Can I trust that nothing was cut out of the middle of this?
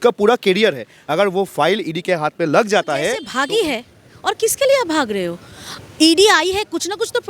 no; 1 cut; at 3.3 s

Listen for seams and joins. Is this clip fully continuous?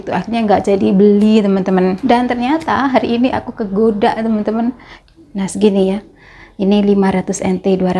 no; 2 cuts; at 2.0 s, 4.9 s

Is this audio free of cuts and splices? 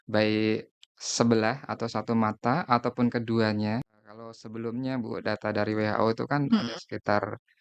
no; 1 cut; at 4.0 s

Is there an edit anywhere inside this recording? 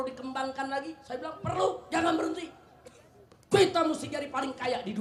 no; 0 cuts

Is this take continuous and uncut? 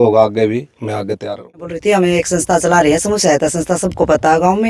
no; 1 cut; at 1.7 s

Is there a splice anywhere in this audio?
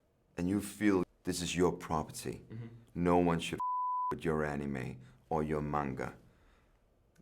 yes; 1 cut; at 1.1 s

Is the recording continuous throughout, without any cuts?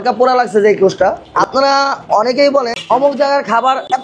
no; 1 cut; at 1.3 s

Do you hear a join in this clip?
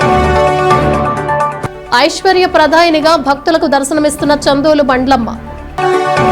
no; 0 cuts

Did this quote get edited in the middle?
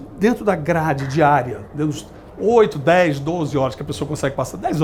no; 0 cuts

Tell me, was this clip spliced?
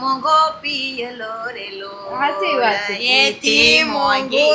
no; 0 cuts

